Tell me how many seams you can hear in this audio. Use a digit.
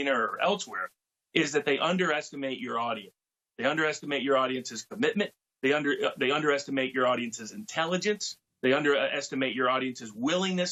0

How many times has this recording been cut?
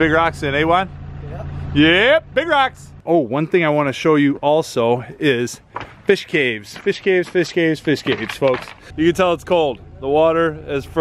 2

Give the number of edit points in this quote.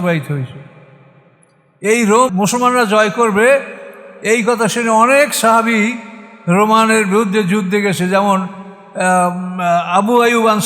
1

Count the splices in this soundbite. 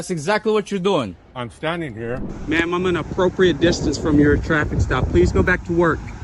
1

